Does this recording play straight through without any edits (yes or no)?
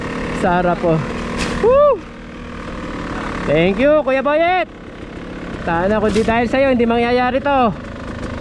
yes